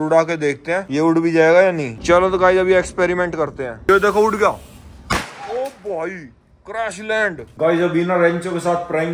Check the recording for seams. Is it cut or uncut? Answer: cut